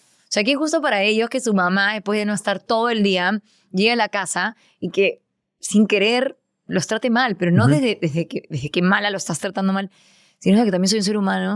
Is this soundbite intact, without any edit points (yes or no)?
yes